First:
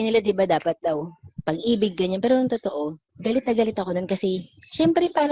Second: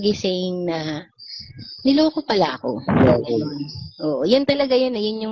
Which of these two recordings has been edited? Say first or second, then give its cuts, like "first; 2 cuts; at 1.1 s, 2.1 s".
first; 1 cut; at 3.0 s